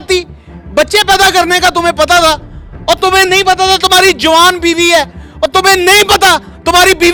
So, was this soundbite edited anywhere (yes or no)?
no